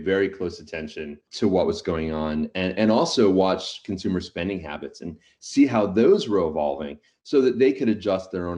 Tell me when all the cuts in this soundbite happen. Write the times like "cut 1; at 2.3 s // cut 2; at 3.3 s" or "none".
cut 1; at 1.3 s